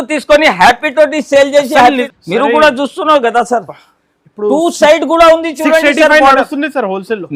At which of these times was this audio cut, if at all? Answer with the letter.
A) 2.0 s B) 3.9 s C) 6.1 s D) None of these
A